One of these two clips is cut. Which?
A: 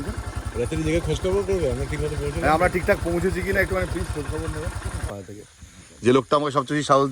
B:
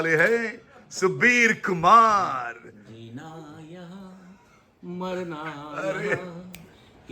A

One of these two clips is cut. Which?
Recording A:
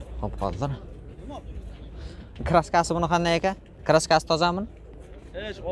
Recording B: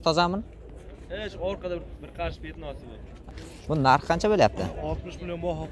B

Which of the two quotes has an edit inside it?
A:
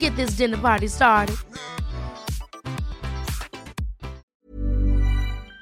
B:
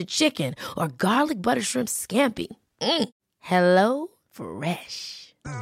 A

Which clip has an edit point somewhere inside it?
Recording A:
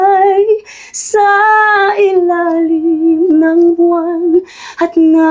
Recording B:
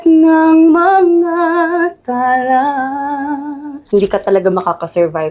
B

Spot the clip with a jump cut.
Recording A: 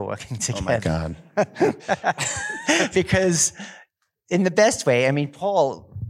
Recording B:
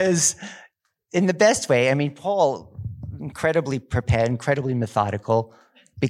A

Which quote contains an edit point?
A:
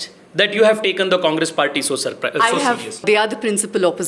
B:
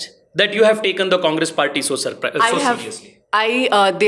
A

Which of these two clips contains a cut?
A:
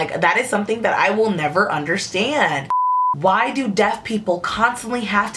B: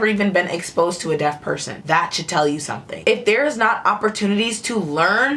A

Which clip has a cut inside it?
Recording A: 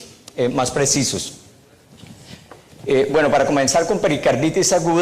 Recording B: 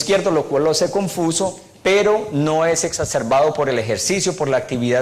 A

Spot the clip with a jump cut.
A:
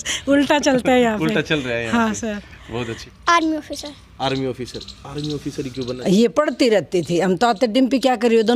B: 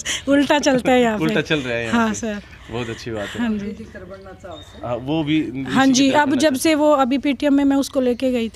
A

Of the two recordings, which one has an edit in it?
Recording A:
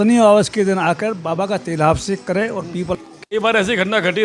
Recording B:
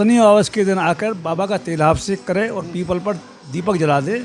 A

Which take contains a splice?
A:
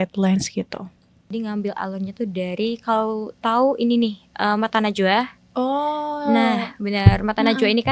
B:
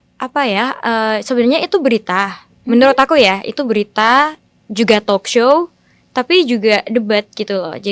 A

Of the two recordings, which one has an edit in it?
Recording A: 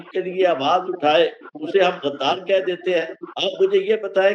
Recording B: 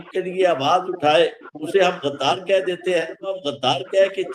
B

